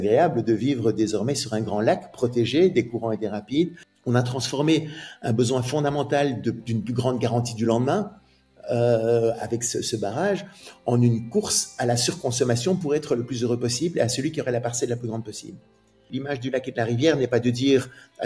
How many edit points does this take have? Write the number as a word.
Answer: two